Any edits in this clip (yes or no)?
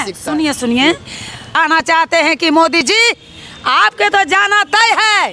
yes